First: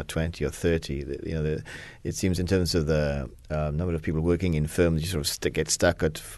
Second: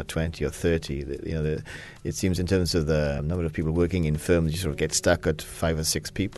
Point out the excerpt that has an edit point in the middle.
second; 3 cuts; at 3.2 s, 4.8 s, 5.5 s

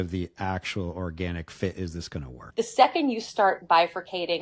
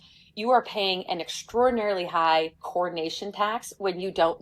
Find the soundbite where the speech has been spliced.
first; 1 cut; at 2.4 s

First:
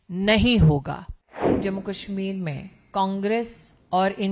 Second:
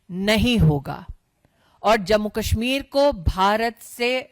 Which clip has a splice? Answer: first; 1 cut; at 1.6 s

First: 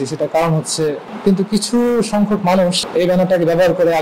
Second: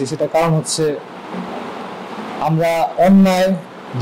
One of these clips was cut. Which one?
first; 2 cuts; at 1.1 s, 2.8 s

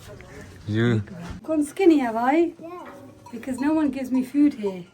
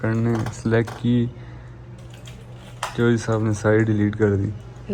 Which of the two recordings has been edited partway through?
first; 1 cut; at 1.3 s

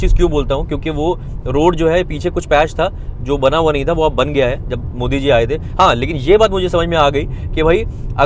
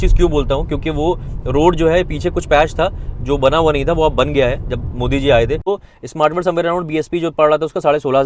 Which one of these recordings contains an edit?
second; 1 cut; at 5.7 s

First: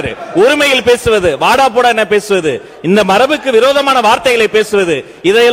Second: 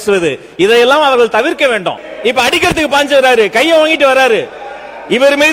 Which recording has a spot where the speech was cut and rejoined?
second; 1 cut; at 2.1 s

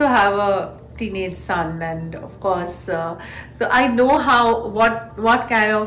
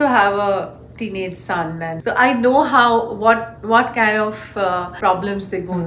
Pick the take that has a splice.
second; 2 cuts; at 2.0 s, 5.0 s

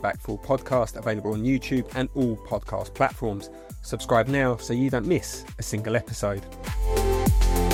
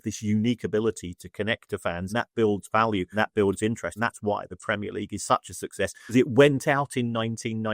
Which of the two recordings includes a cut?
second; 4 cuts; at 2.1 s, 3.1 s, 3.9 s, 6.1 s

